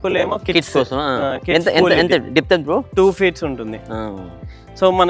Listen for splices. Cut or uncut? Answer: uncut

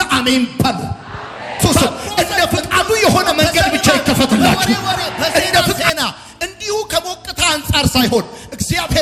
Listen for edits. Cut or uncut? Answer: uncut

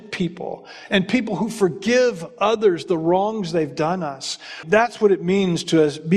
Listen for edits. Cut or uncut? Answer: cut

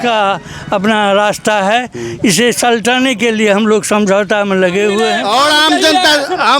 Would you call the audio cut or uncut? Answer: cut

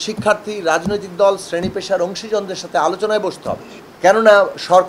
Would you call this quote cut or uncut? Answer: cut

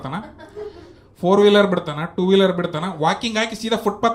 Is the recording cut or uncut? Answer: uncut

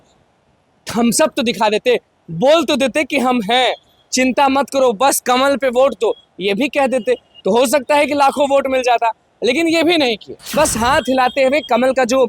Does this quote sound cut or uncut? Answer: cut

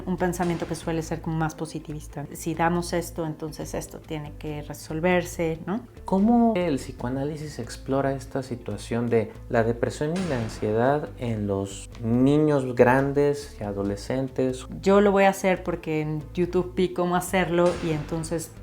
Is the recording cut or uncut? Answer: cut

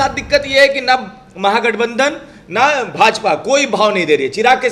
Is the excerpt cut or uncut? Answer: uncut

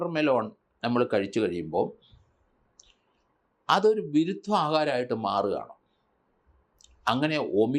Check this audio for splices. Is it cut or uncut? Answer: uncut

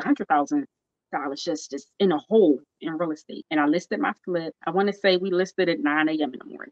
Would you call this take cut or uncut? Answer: cut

